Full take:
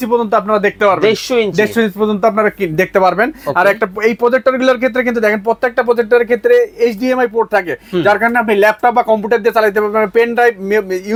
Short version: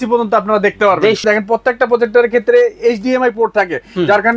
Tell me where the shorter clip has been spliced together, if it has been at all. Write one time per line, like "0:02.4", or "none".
0:01.2